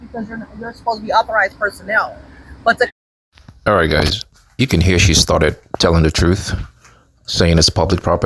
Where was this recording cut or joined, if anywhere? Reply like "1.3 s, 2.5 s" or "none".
none